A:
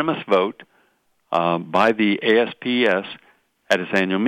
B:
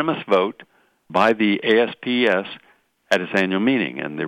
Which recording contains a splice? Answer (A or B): B